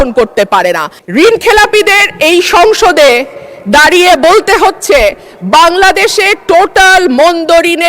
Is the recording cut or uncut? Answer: cut